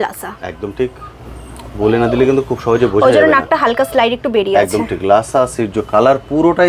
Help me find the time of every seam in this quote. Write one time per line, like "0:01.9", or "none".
none